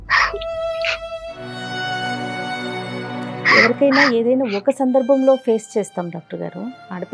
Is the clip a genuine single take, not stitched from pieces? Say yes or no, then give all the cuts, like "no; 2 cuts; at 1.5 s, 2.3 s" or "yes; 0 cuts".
yes; 0 cuts